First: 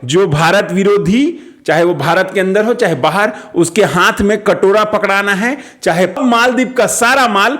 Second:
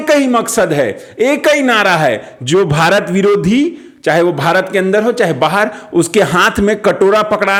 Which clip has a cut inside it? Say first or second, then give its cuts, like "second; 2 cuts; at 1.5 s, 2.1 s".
first; 1 cut; at 6.2 s